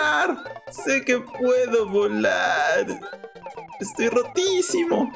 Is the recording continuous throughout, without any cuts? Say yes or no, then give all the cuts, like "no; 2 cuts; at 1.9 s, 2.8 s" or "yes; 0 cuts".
yes; 0 cuts